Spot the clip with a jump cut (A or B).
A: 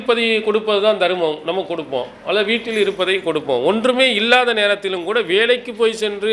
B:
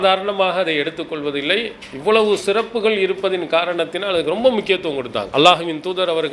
B